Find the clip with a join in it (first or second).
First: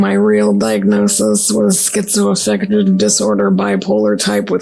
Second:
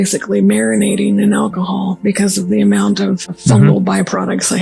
second